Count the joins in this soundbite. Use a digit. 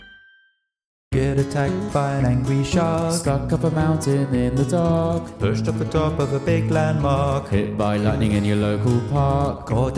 1